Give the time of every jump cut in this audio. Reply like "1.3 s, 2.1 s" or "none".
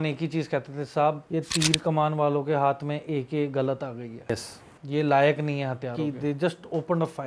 1.2 s, 6.0 s